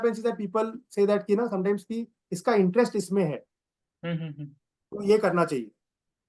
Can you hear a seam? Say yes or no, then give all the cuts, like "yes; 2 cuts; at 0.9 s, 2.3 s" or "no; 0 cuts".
no; 0 cuts